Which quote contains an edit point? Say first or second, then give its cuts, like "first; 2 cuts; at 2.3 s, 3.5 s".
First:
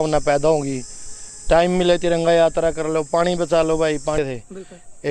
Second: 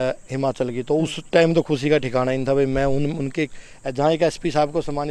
first; 1 cut; at 4.2 s